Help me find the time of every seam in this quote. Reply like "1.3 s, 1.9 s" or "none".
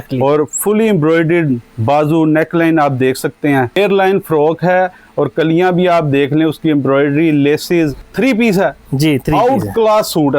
3.8 s, 8.0 s